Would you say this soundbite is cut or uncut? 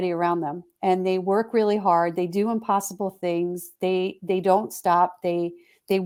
uncut